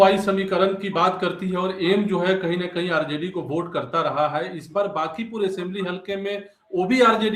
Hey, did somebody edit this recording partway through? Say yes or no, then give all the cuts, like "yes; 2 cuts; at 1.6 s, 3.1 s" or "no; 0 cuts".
no; 0 cuts